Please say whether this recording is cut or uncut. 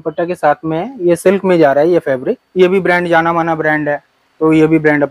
cut